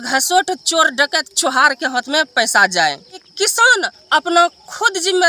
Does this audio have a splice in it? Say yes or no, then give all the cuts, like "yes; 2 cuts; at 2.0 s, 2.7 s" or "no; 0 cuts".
yes; 1 cut; at 3.3 s